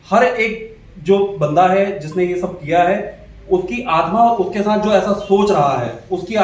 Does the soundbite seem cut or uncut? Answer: uncut